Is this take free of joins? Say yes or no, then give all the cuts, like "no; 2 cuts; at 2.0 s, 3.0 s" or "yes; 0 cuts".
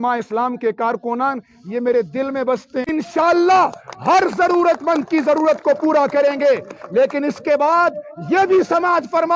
no; 1 cut; at 2.9 s